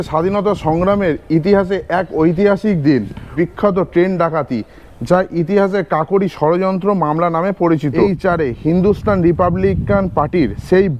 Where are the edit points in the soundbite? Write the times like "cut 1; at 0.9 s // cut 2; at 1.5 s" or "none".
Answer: cut 1; at 3.3 s // cut 2; at 8.1 s